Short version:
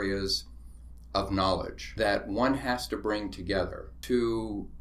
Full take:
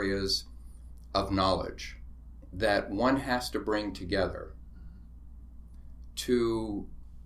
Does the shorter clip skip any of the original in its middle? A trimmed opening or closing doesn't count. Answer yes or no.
yes